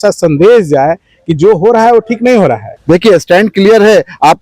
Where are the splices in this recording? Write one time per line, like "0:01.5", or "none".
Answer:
0:02.7